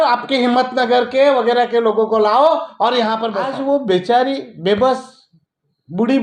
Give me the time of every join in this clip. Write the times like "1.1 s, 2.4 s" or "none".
3.4 s